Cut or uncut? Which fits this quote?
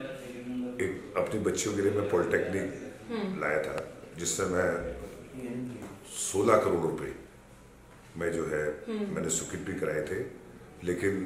uncut